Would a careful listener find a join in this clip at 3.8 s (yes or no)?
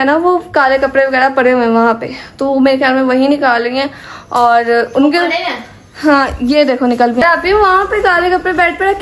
no